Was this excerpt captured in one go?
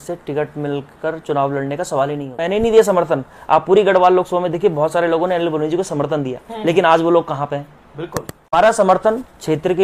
no; 2 cuts; at 2.3 s, 8.5 s

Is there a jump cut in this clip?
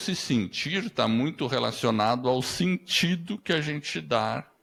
no; 0 cuts

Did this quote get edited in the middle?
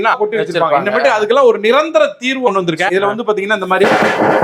no; 0 cuts

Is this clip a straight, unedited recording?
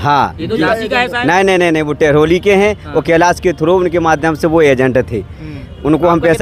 yes; 0 cuts

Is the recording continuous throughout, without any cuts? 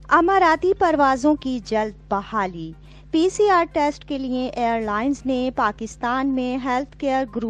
yes; 0 cuts

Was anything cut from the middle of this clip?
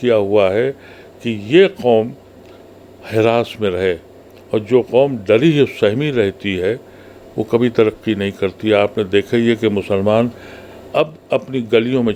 no; 0 cuts

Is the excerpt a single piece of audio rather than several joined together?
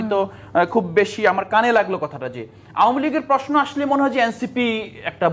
yes; 0 cuts

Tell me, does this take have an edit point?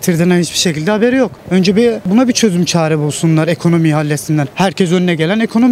yes; 2 cuts; at 1.8 s, 4.5 s

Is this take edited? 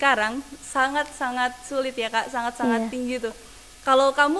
no; 0 cuts

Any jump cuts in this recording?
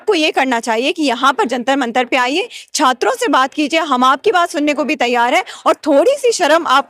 no; 0 cuts

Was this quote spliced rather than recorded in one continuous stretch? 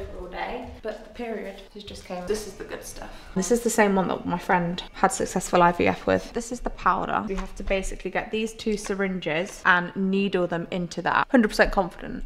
yes; 4 cuts; at 2.2 s, 3.4 s, 6.3 s, 11.3 s

